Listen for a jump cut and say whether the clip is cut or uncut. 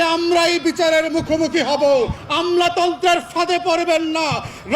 cut